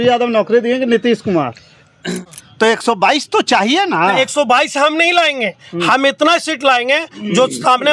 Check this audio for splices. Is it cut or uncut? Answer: cut